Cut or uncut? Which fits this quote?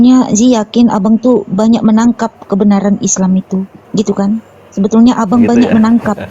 cut